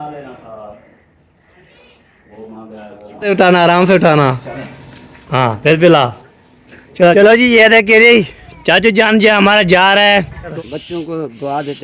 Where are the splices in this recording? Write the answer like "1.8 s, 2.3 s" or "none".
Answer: 3.3 s, 7.1 s, 10.5 s